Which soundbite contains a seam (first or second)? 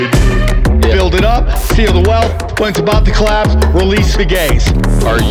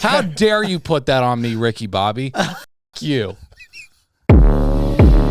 second